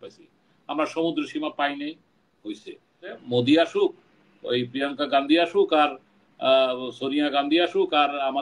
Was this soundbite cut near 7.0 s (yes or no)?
no